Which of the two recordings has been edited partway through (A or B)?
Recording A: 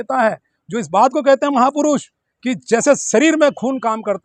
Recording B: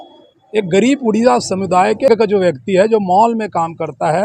B